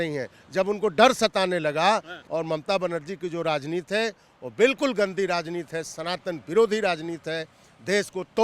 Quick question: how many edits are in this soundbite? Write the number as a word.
one